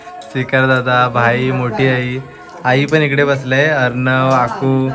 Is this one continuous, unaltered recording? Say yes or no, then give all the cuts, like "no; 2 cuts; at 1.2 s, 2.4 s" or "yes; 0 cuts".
yes; 0 cuts